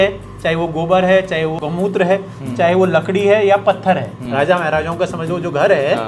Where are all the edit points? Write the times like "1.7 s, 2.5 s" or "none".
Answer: 1.6 s, 4.2 s